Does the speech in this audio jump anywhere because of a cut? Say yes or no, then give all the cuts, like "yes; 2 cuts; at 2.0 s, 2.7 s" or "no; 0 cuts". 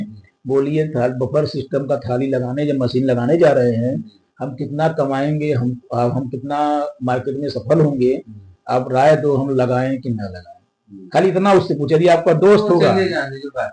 no; 0 cuts